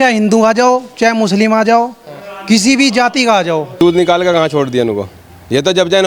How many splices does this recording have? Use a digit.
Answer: 1